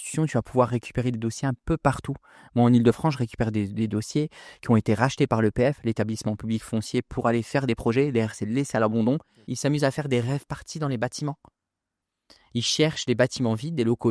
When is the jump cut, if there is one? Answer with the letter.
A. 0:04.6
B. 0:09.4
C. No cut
B